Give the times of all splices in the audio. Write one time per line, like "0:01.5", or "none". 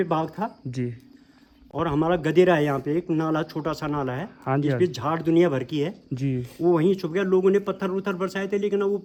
none